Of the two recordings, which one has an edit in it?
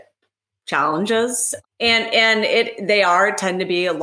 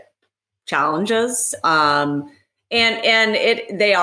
first; 1 cut; at 1.5 s

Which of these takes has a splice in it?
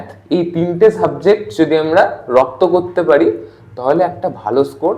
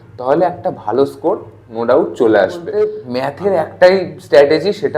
second; 1 cut; at 2.7 s

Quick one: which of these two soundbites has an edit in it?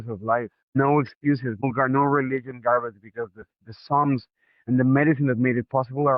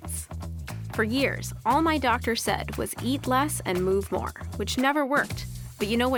first; 2 cuts; at 0.8 s, 1.6 s

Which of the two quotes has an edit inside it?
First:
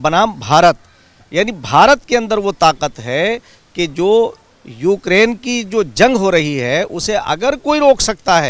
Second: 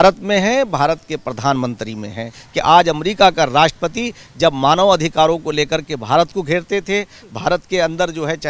second; 1 cut; at 2.4 s

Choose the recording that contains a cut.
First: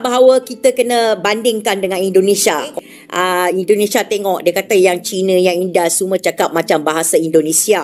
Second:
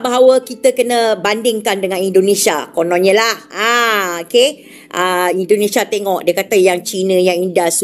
first; 1 cut; at 2.7 s

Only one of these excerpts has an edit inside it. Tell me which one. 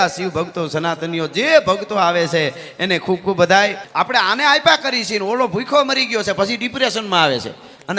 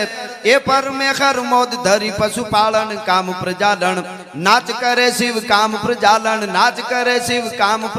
first; 1 cut; at 3.8 s

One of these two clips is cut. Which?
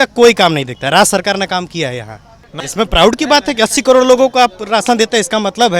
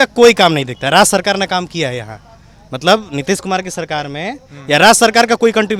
first; 1 cut; at 2.6 s

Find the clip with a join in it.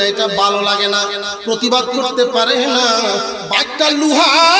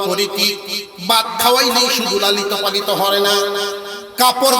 first; 1 cut; at 3.4 s

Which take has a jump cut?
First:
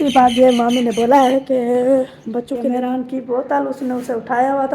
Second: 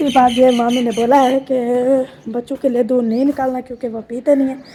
first; 1 cut; at 2.6 s

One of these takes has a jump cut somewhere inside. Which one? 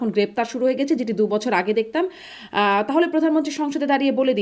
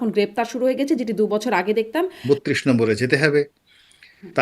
second; 1 cut; at 2.2 s

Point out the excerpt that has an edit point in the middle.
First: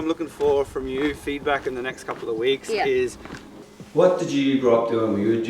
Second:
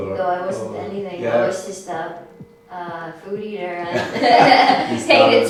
first; 1 cut; at 3.5 s

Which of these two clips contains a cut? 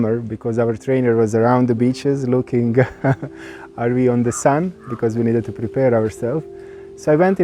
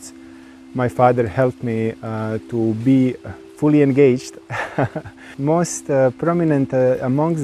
second; 1 cut; at 5.3 s

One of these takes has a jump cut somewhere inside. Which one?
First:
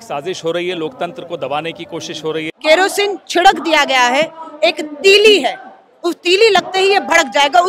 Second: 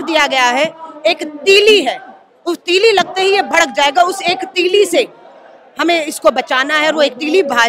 first; 1 cut; at 2.5 s

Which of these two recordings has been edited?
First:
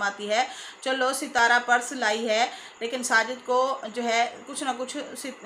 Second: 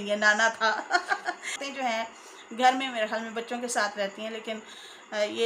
second; 1 cut; at 1.6 s

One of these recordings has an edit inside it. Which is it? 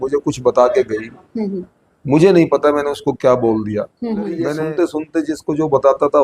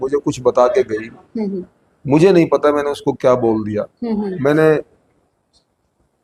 first; 1 cut; at 4.5 s

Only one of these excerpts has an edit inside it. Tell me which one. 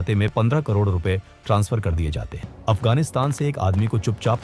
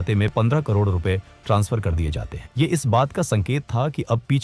first; 1 cut; at 2.5 s

